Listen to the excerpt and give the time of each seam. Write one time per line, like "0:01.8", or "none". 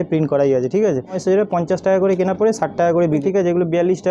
0:01.1
0:03.2

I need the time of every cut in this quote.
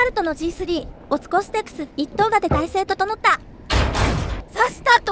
0:00.9
0:04.0

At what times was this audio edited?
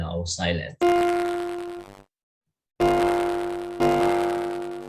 none

